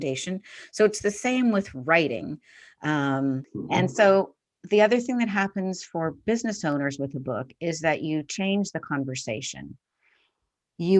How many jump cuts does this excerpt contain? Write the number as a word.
one